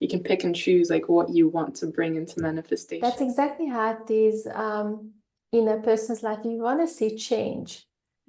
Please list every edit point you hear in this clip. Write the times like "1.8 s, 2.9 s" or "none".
2.9 s